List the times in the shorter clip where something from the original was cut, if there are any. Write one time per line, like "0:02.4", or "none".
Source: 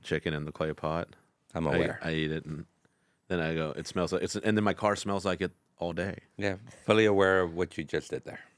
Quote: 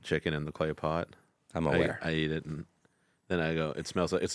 none